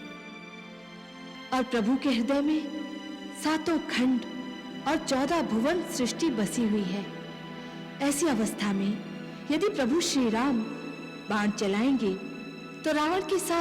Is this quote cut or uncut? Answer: cut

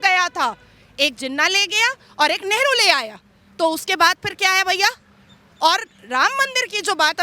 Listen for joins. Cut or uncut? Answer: uncut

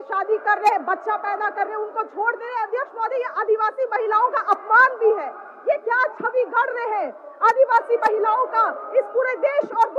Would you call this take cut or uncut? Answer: uncut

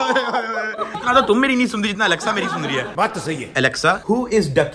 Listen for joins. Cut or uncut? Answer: cut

